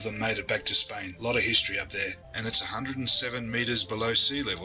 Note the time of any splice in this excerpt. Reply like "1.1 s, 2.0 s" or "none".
2.3 s